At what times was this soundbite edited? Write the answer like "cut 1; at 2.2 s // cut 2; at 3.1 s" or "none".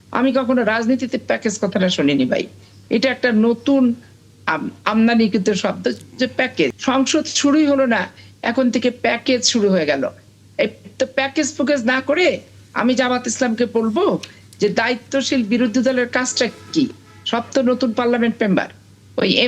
cut 1; at 6.8 s